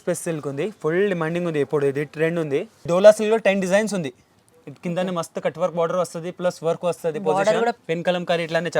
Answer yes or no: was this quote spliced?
yes